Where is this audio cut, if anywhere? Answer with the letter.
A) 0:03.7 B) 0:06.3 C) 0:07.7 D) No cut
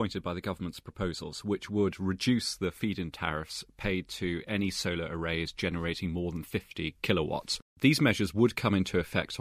C